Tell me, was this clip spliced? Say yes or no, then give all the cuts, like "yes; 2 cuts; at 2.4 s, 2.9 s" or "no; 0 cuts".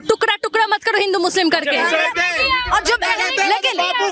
no; 0 cuts